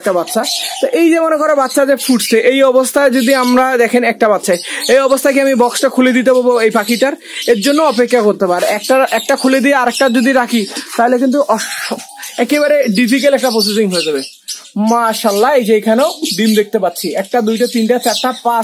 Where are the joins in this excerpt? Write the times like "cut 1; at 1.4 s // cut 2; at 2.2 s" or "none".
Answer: none